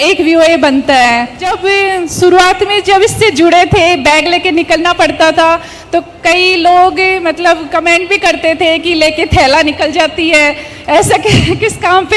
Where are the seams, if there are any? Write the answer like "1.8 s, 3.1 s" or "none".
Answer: 1.4 s